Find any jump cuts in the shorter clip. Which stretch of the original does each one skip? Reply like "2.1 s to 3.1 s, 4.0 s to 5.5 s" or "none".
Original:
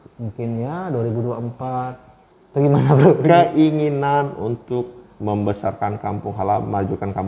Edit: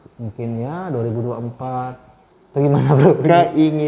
none